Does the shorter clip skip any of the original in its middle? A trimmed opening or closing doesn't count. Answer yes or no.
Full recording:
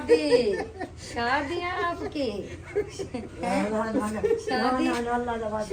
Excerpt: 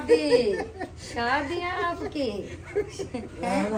no